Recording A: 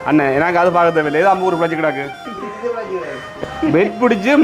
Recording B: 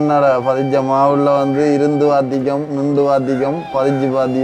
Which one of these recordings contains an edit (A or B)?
A